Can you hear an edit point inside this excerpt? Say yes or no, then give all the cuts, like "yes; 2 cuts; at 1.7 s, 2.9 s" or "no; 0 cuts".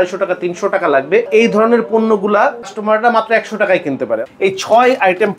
yes; 3 cuts; at 1.3 s, 2.7 s, 4.3 s